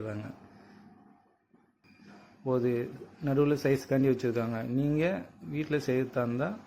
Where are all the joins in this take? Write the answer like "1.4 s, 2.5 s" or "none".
1.8 s